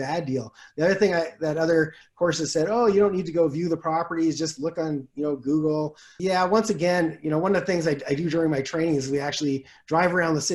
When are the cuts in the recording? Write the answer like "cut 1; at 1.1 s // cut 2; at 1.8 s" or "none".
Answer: cut 1; at 6.0 s